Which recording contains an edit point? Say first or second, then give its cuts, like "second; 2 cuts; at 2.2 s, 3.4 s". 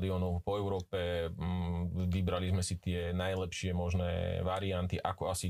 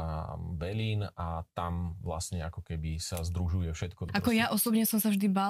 second; 1 cut; at 4.0 s